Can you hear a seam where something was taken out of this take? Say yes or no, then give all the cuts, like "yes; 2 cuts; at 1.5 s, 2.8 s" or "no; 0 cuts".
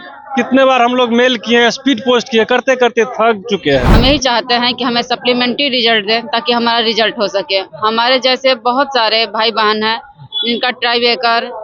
yes; 1 cut; at 3.9 s